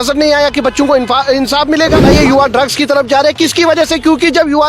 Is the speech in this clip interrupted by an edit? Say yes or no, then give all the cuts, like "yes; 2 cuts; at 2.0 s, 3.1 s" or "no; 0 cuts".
yes; 1 cut; at 2.0 s